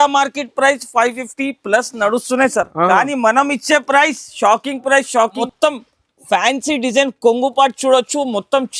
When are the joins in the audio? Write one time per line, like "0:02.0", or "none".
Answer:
0:05.3